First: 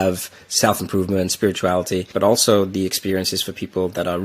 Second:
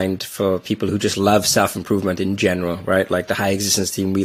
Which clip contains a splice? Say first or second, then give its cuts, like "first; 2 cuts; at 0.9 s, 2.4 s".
first; 1 cut; at 2.1 s